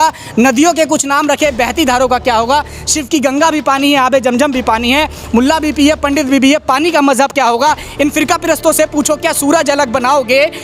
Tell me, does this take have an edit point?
no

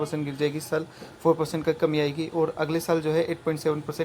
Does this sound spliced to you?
no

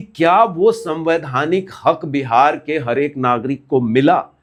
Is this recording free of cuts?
yes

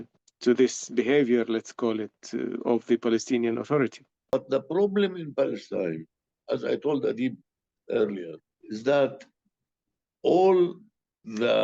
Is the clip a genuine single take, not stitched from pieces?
no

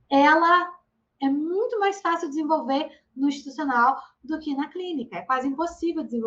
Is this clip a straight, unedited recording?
yes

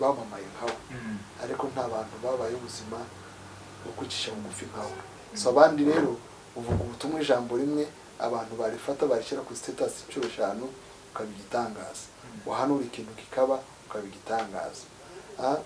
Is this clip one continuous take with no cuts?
no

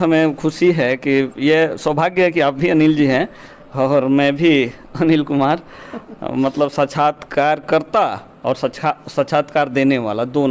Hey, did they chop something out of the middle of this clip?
no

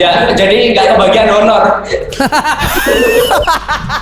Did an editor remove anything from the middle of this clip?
no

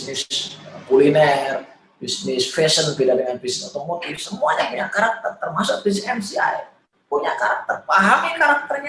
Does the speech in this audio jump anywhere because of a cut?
no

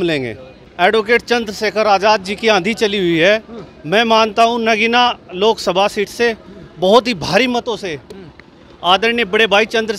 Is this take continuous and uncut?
yes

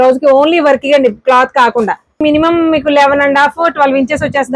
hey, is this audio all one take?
no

